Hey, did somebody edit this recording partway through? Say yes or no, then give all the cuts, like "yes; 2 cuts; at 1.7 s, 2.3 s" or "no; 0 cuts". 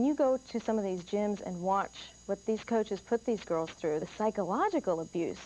yes; 1 cut; at 4.1 s